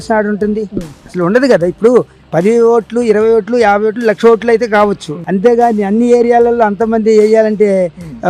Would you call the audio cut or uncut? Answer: uncut